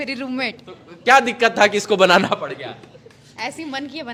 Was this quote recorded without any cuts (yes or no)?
yes